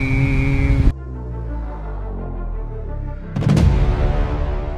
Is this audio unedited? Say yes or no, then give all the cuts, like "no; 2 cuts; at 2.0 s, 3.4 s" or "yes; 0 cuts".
yes; 0 cuts